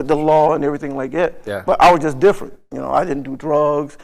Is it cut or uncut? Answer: uncut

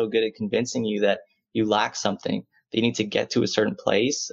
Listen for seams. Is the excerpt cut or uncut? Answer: uncut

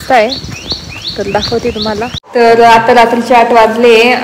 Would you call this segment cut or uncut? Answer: cut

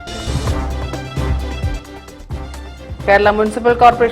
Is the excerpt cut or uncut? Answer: uncut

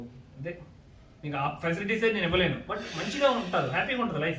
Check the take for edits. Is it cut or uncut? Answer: uncut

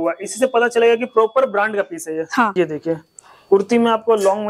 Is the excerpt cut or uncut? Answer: cut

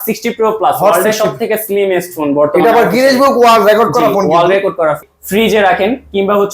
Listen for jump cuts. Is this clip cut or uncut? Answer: cut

